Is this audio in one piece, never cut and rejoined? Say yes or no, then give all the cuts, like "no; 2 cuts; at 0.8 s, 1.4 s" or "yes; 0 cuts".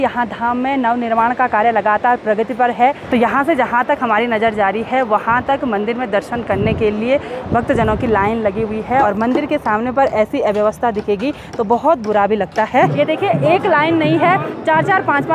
no; 3 cuts; at 3.0 s, 9.0 s, 12.9 s